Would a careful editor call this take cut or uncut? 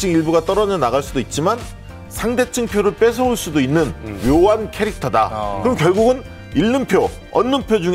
uncut